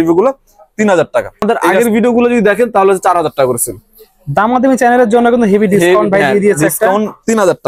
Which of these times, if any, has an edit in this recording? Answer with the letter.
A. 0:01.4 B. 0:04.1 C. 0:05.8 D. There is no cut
A